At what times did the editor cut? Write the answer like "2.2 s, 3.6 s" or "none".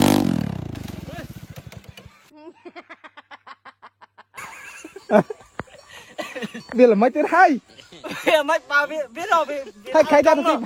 none